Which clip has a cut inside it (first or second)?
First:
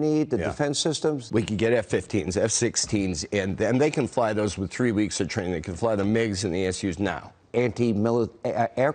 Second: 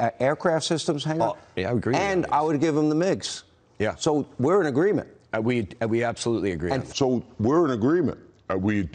first